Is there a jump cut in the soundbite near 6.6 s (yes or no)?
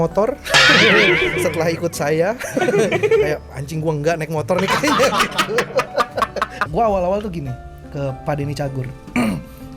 yes